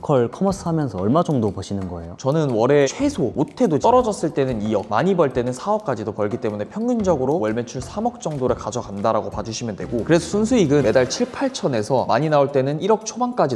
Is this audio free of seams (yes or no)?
yes